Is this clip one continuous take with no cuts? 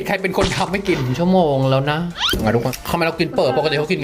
no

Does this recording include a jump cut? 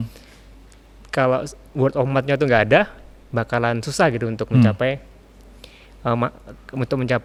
no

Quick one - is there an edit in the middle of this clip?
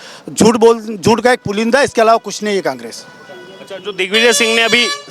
no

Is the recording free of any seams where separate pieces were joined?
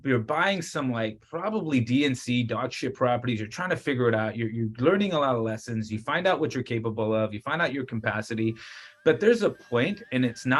yes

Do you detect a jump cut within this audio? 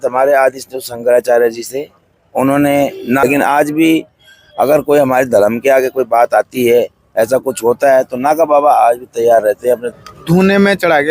yes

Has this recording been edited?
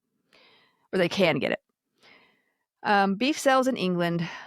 no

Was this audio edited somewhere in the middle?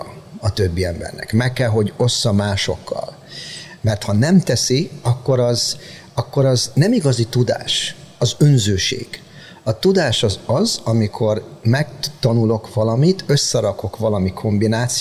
no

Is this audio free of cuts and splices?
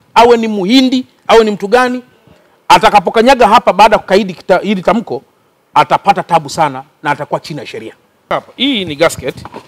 no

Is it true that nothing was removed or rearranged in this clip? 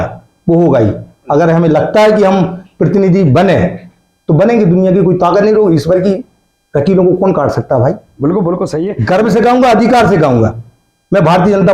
no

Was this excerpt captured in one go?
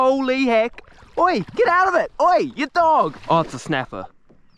no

